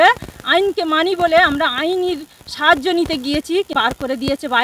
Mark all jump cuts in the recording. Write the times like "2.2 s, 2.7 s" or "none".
3.7 s